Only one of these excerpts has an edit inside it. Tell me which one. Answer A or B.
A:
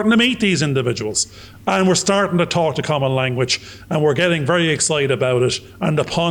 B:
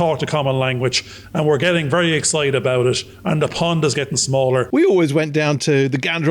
B